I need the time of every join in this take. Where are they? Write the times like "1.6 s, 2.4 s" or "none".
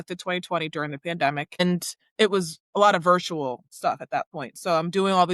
1.6 s

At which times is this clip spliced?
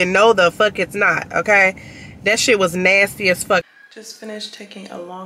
3.6 s

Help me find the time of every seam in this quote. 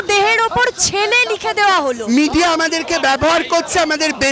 2.0 s

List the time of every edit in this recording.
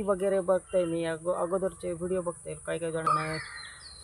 3.1 s

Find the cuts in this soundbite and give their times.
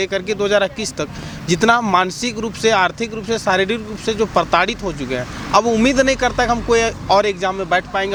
none

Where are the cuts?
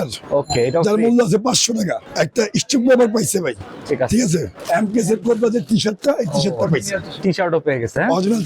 2.0 s, 4.5 s

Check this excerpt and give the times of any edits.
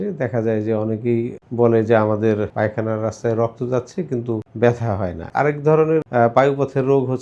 1.4 s, 2.5 s, 4.5 s, 5.2 s, 6.1 s

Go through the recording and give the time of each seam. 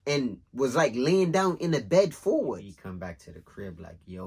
2.7 s

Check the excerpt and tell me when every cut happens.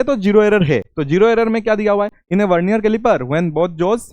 0.9 s, 2.2 s

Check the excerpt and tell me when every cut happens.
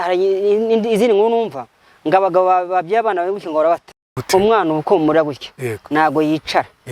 4.1 s

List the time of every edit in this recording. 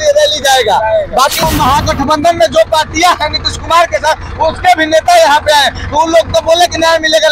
1.4 s

